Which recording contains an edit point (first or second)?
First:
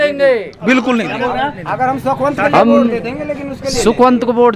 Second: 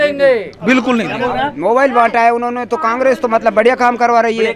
second